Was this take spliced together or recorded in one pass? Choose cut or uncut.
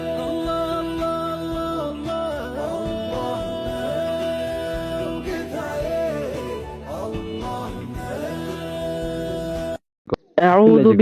cut